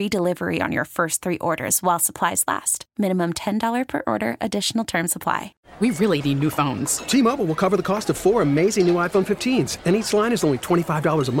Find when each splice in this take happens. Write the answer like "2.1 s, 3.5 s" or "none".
5.6 s